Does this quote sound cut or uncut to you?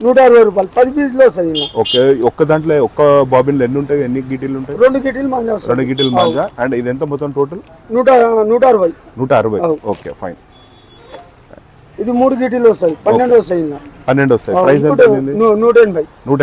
uncut